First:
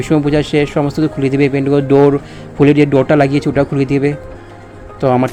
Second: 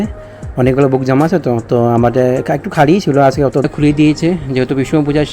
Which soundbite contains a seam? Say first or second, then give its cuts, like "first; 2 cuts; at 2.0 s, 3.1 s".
second; 1 cut; at 3.7 s